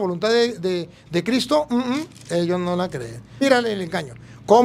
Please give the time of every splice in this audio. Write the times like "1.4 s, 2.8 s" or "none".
3.4 s